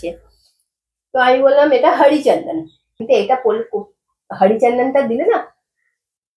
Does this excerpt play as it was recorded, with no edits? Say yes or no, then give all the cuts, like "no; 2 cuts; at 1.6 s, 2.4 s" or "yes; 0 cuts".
no; 1 cut; at 3.0 s